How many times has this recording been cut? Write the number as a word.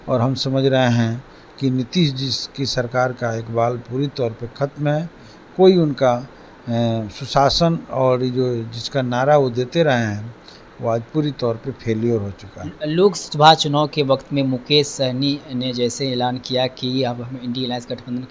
zero